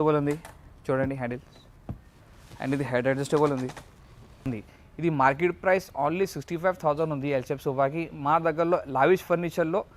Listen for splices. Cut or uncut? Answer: cut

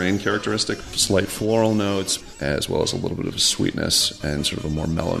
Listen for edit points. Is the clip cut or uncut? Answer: cut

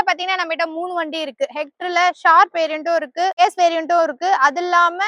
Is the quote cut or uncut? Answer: cut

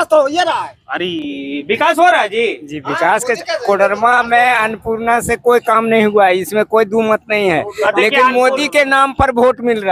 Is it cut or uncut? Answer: uncut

